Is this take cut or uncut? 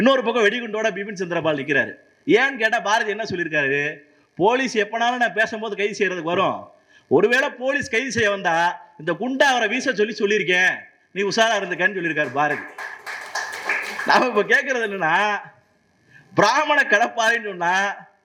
uncut